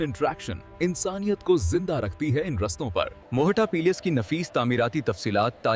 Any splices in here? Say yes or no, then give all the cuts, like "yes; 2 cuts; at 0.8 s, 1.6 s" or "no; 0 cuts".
yes; 1 cut; at 3.2 s